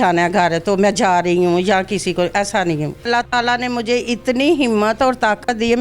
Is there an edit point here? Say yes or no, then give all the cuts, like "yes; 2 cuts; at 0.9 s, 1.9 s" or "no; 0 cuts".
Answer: yes; 1 cut; at 3.1 s